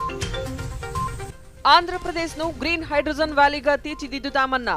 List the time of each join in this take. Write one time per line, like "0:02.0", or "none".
0:01.1